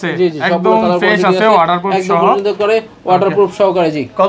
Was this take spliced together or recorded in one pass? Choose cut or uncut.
uncut